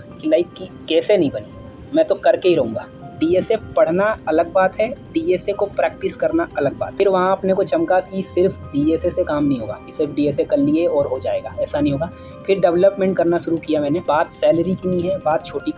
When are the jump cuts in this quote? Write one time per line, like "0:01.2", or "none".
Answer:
0:03.0
0:06.8
0:14.0

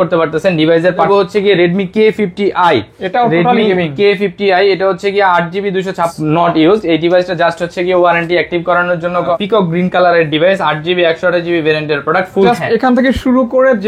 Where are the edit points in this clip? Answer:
0:01.1
0:06.1
0:09.3
0:12.5

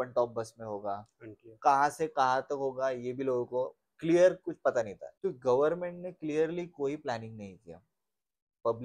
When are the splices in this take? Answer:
0:05.0

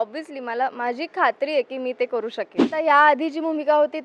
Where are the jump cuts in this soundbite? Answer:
0:02.8

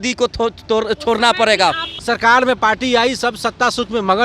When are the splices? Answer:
0:01.9

